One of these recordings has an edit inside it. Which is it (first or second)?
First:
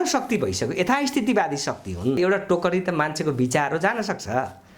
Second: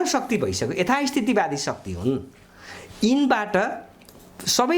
first